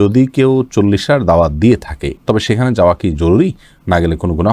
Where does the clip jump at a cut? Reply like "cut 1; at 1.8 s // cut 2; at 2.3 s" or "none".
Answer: none